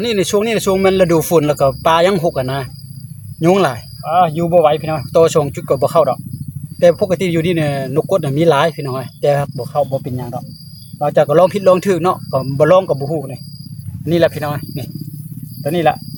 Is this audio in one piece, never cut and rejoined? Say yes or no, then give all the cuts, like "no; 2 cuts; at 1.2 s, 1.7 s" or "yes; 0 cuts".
yes; 0 cuts